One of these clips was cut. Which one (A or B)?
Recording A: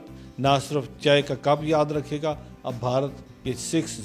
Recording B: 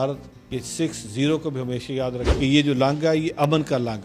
B